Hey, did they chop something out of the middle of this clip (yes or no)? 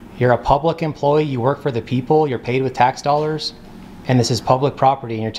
no